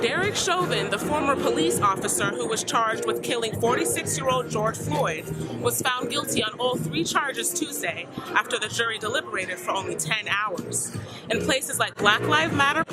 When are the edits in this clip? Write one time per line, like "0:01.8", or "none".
none